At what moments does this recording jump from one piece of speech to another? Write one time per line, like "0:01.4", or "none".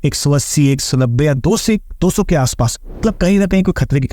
0:03.0